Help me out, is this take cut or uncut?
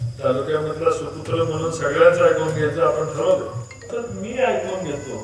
cut